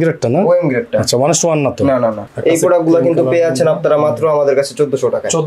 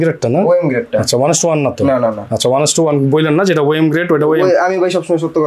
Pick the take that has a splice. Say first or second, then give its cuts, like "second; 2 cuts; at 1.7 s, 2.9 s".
first; 1 cut; at 2.3 s